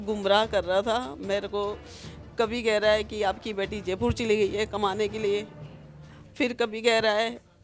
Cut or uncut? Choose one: uncut